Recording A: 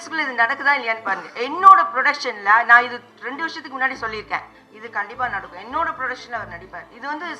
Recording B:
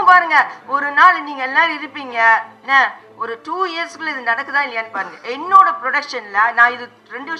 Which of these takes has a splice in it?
A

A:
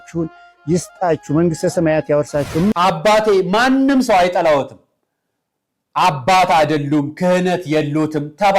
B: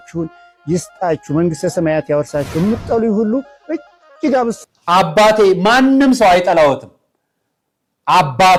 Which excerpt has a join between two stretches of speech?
A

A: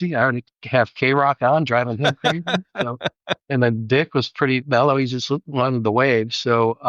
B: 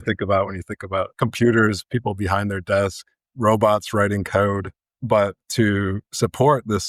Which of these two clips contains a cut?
A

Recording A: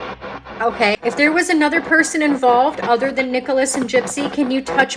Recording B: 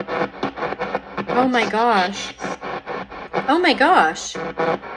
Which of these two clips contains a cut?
A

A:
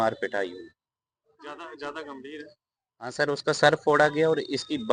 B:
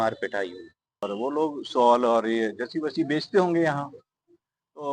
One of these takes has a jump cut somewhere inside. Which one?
B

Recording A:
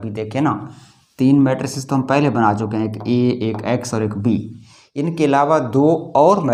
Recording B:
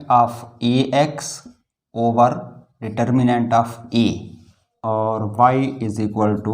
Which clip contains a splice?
B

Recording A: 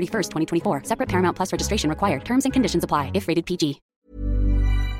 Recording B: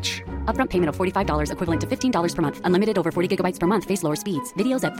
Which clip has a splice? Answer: A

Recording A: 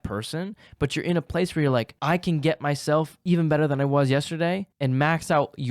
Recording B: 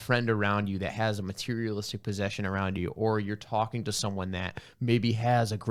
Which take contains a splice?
A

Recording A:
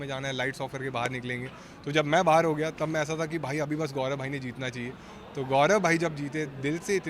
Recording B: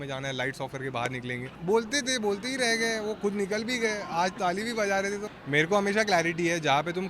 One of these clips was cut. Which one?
B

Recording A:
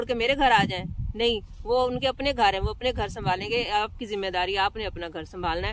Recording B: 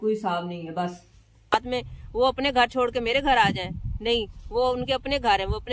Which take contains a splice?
B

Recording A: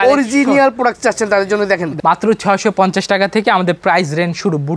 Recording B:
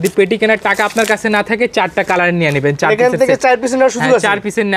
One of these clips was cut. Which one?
A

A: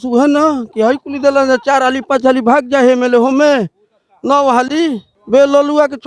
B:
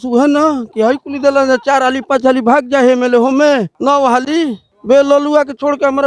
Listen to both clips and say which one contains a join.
B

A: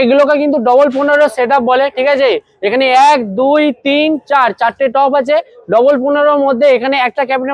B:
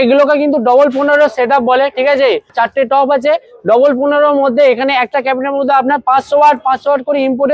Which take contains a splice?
B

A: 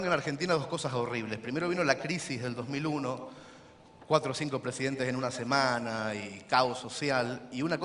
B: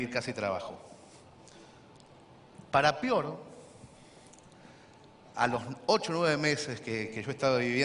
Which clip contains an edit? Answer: B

